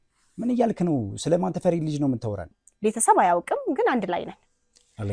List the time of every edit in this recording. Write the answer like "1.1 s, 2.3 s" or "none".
2.6 s